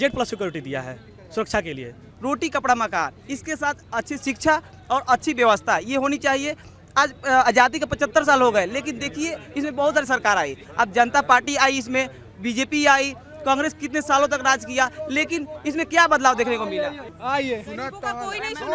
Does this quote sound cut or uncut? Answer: cut